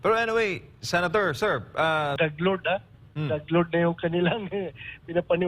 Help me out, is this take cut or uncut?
cut